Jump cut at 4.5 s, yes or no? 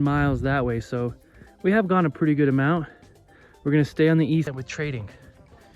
yes